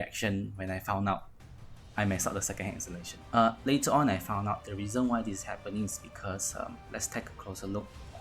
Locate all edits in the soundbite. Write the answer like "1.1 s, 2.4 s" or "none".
3.1 s